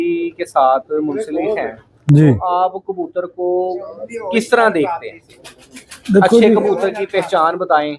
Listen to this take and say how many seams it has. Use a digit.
0